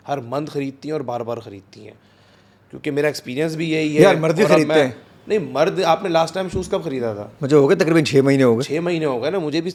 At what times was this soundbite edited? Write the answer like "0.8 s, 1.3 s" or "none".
none